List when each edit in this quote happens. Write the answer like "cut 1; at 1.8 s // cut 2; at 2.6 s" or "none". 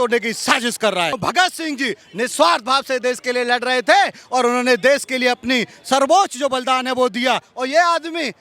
cut 1; at 1.2 s